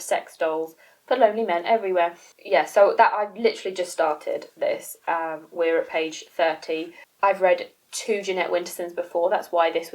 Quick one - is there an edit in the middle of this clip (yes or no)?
no